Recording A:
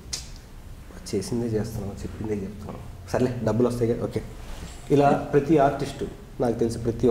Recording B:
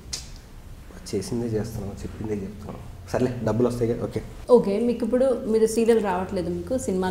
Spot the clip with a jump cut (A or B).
B